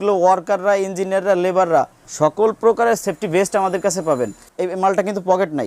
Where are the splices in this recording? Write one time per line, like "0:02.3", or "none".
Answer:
0:02.0
0:04.4